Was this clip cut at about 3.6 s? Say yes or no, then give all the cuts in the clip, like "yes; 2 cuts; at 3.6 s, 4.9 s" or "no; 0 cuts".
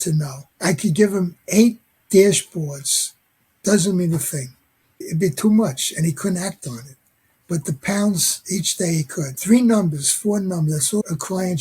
no; 1 cut; at 9.3 s